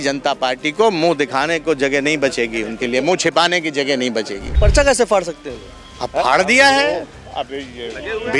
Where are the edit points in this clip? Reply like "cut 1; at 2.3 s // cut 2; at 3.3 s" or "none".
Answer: cut 1; at 4.5 s